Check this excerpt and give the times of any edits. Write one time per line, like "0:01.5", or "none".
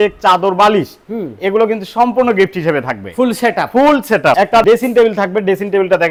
none

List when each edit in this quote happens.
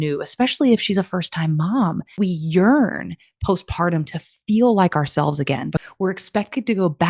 0:02.1
0:05.7

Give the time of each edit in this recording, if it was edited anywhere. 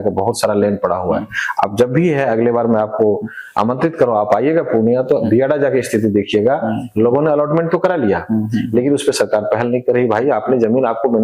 none

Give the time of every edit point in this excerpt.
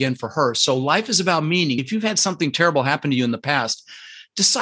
0:01.8

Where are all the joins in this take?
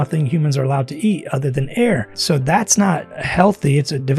0:02.1
0:03.1

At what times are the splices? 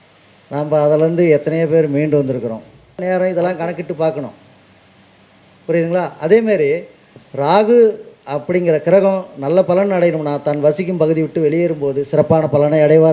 0:03.0

